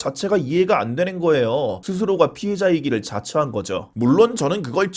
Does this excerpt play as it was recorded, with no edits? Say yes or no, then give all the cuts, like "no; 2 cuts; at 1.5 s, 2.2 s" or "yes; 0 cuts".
no; 2 cuts; at 1.8 s, 3.9 s